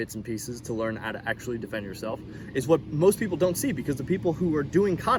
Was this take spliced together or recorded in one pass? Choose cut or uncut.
uncut